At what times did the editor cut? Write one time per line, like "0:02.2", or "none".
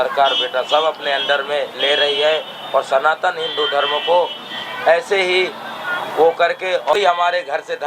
0:06.9